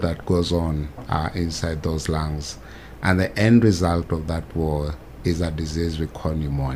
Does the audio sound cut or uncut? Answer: uncut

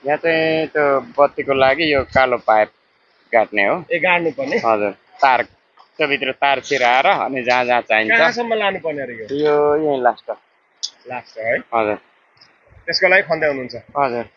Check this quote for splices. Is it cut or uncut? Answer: uncut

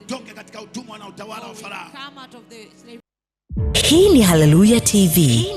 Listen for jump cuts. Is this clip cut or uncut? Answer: cut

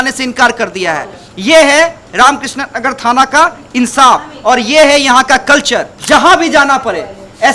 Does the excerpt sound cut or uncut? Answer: cut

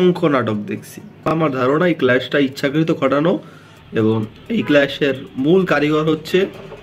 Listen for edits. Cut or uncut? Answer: cut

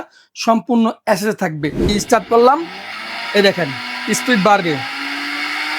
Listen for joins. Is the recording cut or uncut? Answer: cut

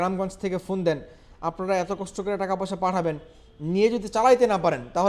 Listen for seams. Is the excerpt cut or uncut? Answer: uncut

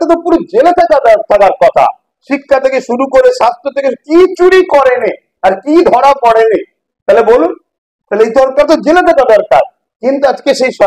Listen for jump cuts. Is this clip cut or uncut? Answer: uncut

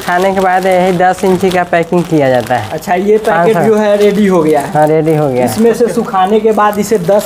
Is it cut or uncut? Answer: uncut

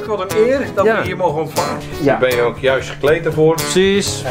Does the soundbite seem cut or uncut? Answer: cut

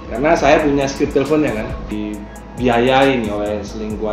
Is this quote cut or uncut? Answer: cut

